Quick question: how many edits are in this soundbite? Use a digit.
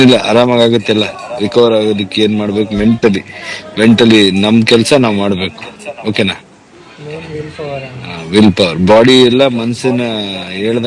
0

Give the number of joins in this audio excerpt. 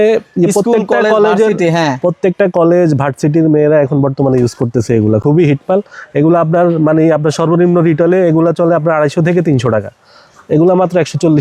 0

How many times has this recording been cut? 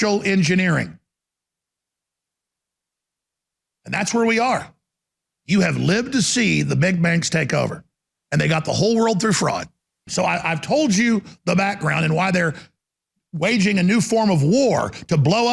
1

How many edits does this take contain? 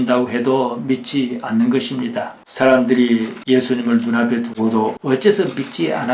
1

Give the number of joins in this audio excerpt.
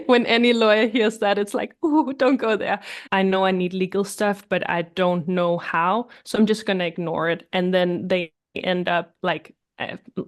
1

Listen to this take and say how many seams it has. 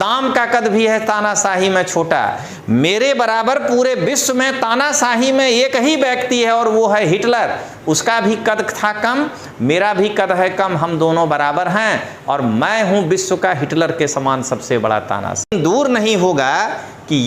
1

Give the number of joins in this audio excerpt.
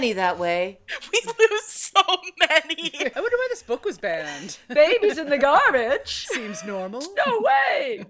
1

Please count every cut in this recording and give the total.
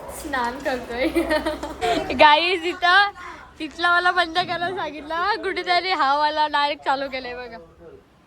1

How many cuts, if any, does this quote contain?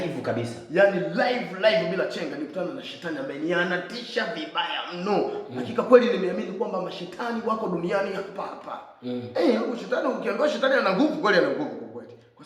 1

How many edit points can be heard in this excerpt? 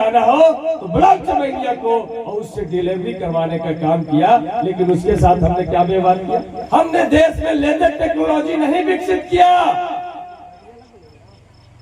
1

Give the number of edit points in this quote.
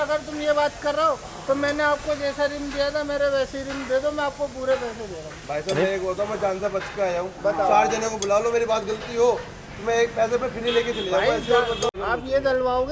1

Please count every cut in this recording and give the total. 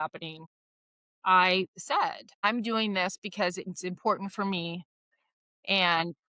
1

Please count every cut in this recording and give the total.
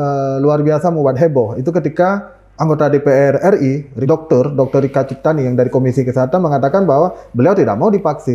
1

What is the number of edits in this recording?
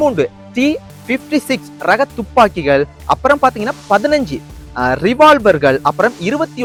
0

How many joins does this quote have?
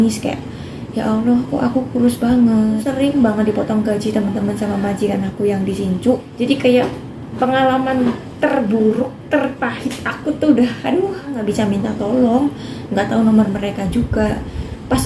3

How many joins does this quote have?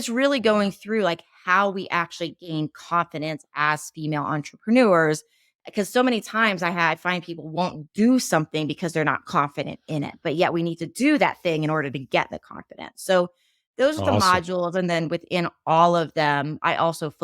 0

